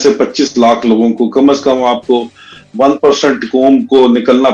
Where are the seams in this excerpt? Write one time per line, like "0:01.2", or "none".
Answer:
none